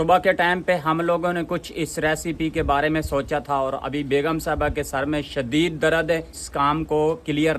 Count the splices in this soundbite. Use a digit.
1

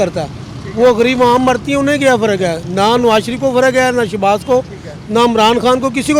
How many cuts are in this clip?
0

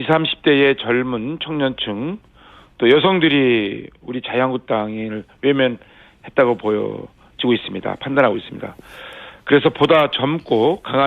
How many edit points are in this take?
1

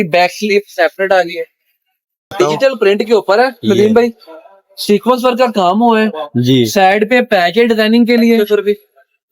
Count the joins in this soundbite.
2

